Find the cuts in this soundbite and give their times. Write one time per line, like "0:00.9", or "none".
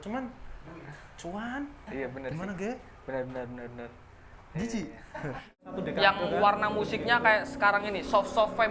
0:05.6